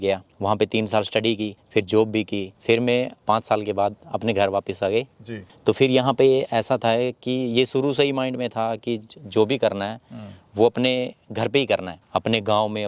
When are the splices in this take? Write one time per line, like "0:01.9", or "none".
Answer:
none